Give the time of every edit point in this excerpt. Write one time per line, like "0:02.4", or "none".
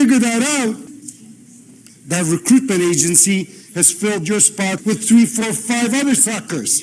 0:00.9
0:04.8